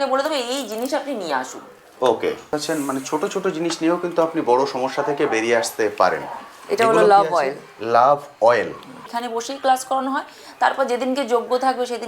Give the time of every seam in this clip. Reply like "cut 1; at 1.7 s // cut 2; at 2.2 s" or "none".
cut 1; at 2.5 s // cut 2; at 9.0 s